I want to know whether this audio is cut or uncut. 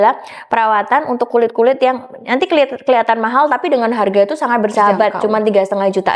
uncut